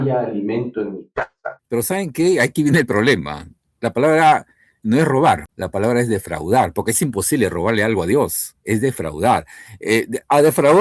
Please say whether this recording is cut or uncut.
cut